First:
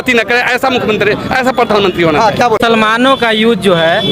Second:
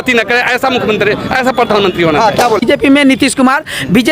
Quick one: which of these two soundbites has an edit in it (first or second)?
second